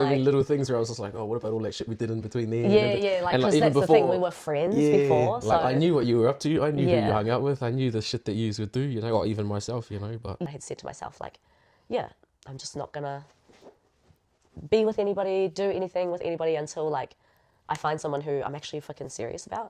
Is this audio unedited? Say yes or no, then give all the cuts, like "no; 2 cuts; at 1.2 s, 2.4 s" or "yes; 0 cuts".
no; 1 cut; at 10.6 s